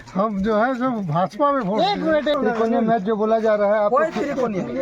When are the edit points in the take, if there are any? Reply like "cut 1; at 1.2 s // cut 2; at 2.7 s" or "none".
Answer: cut 1; at 2.4 s